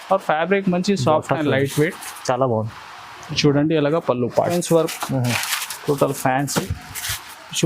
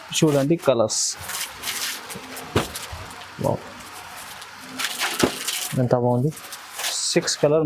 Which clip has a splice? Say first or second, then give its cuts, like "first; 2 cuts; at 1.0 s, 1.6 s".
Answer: first; 1 cut; at 4.5 s